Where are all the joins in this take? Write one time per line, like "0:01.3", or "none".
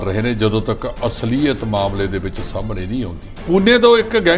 0:03.3